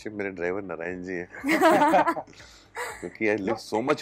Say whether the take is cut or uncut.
uncut